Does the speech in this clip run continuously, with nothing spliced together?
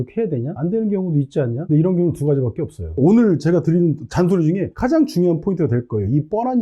no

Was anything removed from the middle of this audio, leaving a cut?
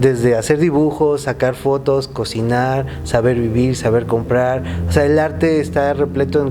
no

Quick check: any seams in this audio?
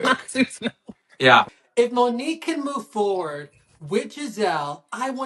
yes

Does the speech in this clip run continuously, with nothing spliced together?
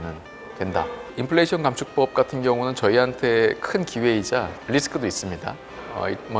no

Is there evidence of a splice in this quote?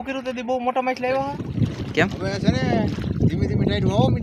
yes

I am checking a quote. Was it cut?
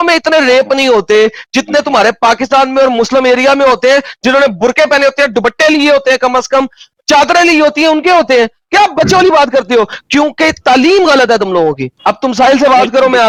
no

